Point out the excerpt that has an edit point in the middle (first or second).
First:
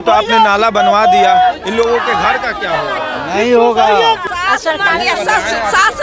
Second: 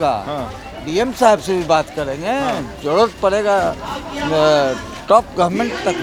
first